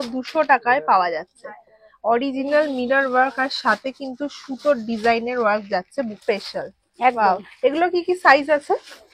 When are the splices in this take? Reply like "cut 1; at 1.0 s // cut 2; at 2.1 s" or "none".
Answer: cut 1; at 6.2 s